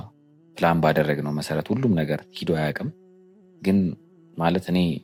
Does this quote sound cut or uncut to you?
uncut